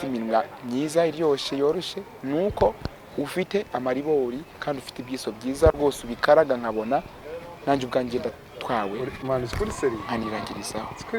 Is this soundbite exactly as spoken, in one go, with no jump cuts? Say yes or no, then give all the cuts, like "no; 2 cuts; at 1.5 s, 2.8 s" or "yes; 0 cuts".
yes; 0 cuts